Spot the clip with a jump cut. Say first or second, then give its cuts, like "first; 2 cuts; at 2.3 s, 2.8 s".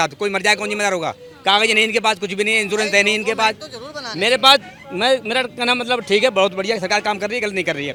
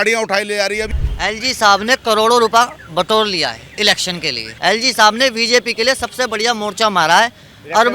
second; 2 cuts; at 0.9 s, 4.5 s